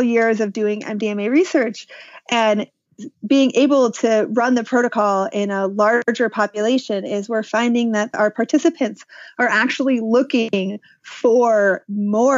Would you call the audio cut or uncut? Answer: cut